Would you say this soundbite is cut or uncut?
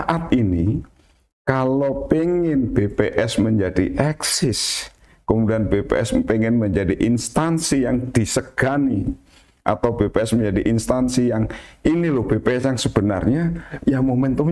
uncut